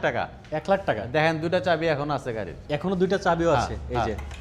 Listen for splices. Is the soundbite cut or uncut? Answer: uncut